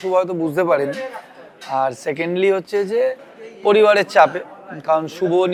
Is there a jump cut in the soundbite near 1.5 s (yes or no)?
no